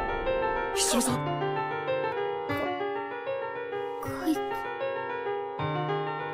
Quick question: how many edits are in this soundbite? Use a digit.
1